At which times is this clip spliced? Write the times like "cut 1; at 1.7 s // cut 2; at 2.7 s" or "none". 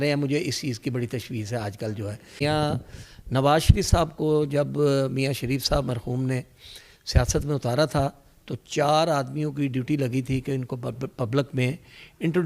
cut 1; at 2.4 s